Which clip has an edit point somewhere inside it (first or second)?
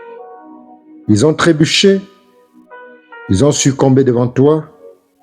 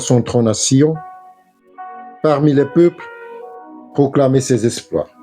first